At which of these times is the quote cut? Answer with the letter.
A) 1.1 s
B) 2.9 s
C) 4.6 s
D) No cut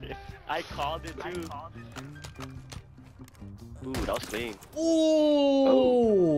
C